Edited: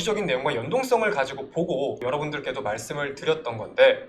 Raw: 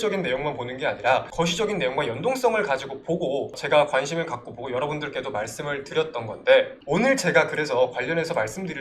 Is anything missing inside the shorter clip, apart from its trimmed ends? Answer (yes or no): yes